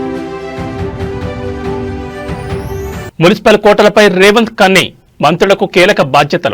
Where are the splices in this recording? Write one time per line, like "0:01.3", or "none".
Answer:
0:01.8